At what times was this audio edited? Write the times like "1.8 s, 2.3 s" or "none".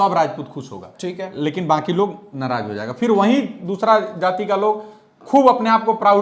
none

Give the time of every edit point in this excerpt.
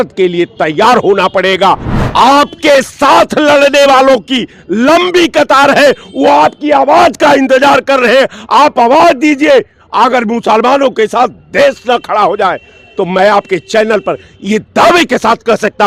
1.9 s

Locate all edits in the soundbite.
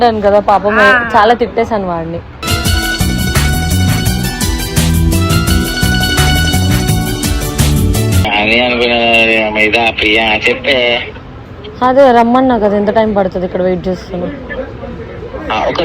8.3 s

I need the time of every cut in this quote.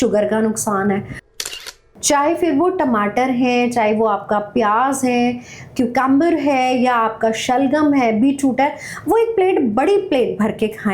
1.5 s

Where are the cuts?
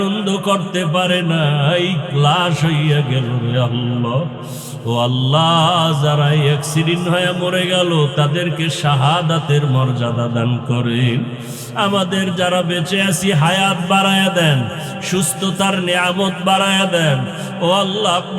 none

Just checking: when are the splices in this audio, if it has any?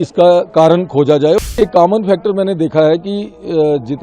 1.4 s

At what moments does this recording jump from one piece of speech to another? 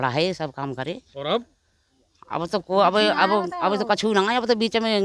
none

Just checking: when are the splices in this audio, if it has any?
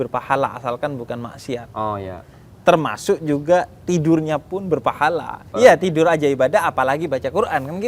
5.4 s

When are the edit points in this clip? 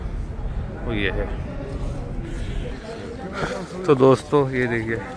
2.7 s

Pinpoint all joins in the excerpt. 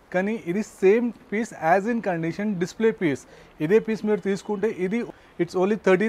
5.1 s

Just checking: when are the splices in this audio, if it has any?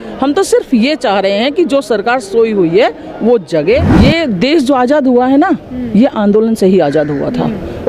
3.9 s

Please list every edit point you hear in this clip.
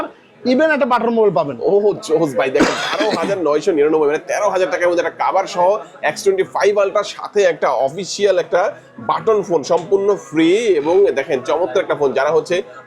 none

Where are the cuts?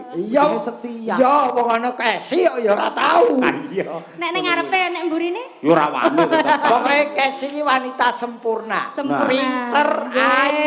none

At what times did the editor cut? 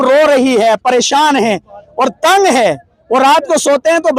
none

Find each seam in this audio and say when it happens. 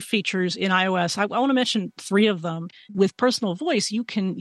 2.9 s

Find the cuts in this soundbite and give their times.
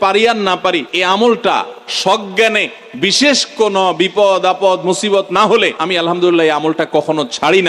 0.9 s, 5.8 s

